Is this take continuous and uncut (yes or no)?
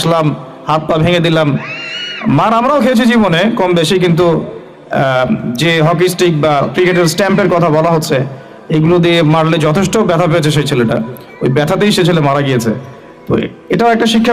yes